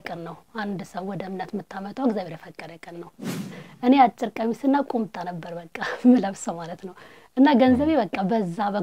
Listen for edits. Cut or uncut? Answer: cut